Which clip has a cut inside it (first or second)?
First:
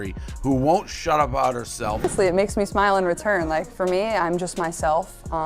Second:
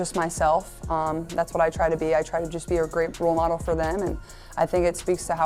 first